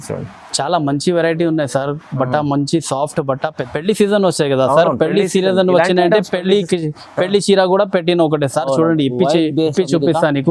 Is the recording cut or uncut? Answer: cut